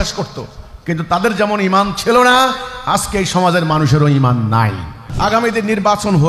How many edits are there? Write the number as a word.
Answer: one